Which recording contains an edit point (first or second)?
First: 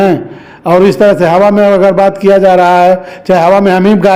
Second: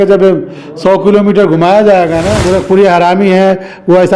second